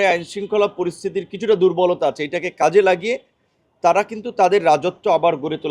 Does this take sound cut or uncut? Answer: uncut